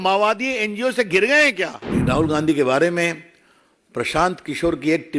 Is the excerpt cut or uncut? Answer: cut